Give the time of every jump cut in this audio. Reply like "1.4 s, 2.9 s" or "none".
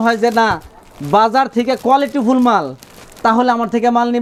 none